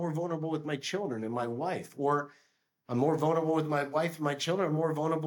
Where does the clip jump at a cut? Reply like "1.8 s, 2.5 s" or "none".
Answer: none